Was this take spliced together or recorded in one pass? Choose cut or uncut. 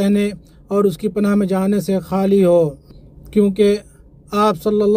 uncut